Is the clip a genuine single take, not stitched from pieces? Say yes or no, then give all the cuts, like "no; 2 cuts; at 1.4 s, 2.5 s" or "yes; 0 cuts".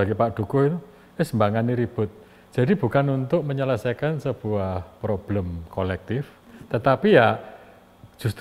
yes; 0 cuts